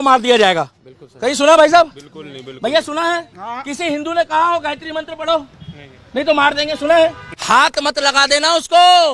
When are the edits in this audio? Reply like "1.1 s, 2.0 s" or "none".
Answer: 7.3 s